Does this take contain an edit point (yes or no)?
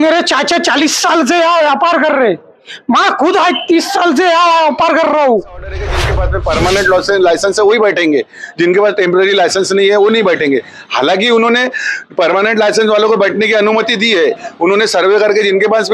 yes